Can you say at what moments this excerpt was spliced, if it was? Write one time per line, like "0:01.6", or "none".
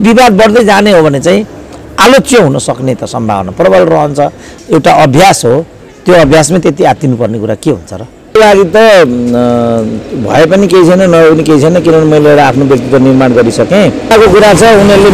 0:04.5
0:08.4
0:14.1